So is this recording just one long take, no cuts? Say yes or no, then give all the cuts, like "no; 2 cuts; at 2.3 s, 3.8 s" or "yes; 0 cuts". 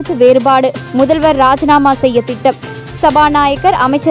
yes; 0 cuts